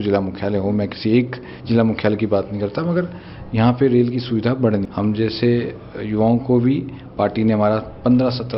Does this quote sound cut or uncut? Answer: cut